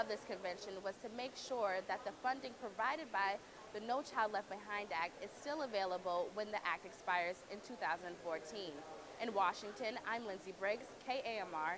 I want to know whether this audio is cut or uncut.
uncut